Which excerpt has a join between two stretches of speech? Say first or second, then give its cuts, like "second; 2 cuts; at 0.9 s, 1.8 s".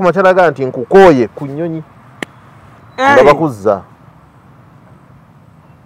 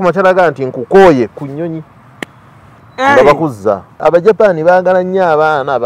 second; 1 cut; at 3.9 s